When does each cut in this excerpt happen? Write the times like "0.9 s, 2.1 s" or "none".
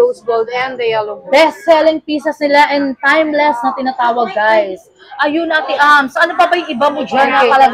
none